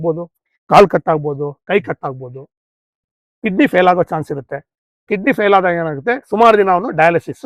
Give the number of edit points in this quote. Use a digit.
0